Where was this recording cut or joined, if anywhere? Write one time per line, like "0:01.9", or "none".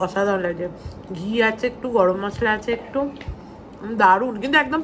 none